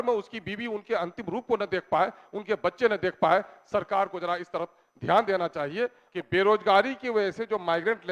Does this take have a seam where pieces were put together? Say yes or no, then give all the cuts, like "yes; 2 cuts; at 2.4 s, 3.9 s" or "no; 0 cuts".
yes; 1 cut; at 6.0 s